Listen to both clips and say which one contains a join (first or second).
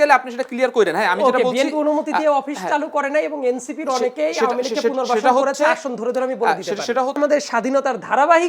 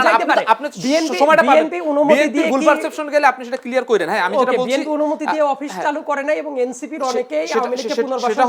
first